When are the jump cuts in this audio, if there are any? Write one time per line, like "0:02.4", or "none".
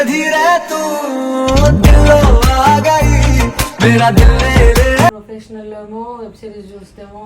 0:05.3